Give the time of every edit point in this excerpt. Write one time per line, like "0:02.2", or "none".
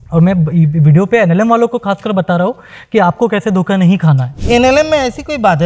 0:04.3